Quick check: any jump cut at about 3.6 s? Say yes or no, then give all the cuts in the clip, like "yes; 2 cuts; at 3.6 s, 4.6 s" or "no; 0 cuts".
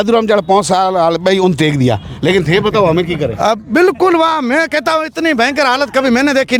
no; 0 cuts